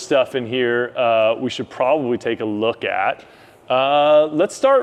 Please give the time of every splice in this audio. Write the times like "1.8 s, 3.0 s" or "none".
none